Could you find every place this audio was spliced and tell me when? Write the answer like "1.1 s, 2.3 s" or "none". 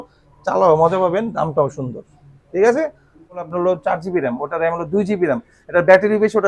3.5 s